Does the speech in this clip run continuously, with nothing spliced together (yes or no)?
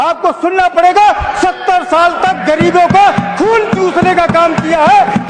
yes